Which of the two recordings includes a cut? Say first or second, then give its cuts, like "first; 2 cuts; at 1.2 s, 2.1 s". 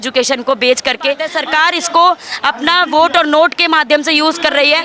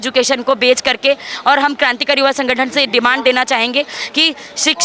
first; 1 cut; at 1.3 s